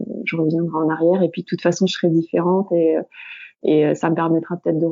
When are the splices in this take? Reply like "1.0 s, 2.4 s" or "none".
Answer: none